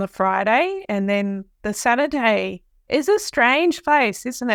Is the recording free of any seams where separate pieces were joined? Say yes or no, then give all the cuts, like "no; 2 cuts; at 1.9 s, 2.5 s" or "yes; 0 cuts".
yes; 0 cuts